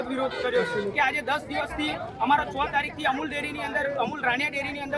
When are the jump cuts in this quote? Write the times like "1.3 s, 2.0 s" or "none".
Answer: 0.9 s